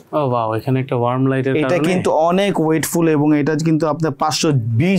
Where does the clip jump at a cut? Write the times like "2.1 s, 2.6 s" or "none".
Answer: none